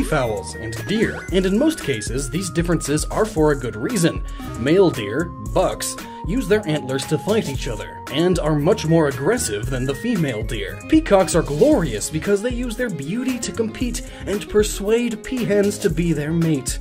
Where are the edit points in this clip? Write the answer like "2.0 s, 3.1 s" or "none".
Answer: none

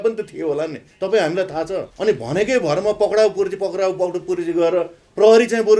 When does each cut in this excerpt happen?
1.9 s

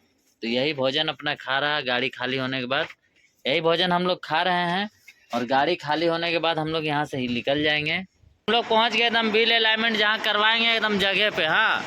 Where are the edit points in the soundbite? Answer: 8.5 s

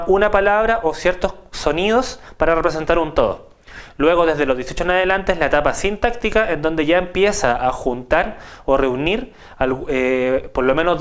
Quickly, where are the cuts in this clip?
4.6 s

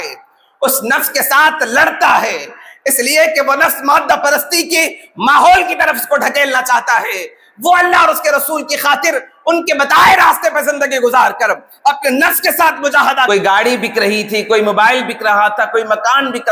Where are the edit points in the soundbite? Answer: 13.3 s

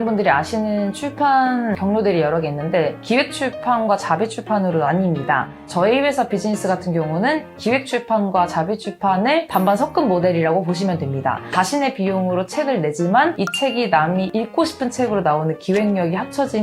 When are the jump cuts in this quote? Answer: 1.8 s, 5.6 s

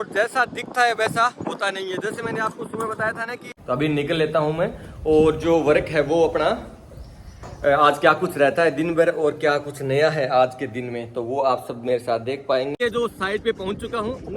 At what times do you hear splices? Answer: 3.5 s, 12.8 s

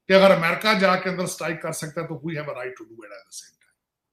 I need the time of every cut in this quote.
none

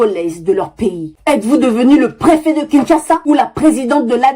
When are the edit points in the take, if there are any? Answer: 1.1 s

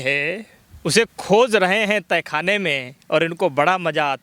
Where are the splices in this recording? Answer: none

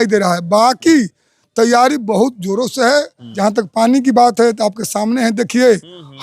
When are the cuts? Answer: 3.2 s

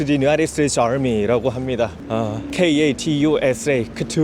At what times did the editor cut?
2.3 s

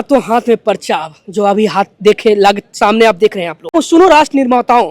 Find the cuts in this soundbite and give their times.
3.7 s

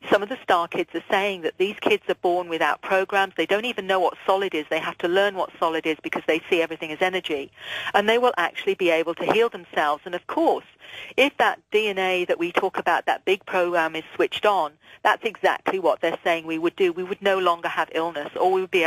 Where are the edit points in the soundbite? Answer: 8.1 s

